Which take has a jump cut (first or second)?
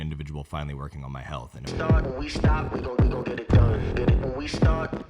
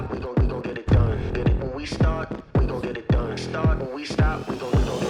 first